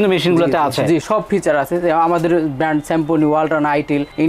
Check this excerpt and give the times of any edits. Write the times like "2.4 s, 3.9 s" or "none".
none